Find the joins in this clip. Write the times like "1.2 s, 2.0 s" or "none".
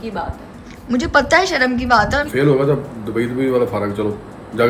2.3 s